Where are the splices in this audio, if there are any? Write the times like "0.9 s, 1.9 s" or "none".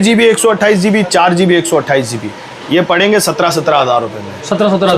none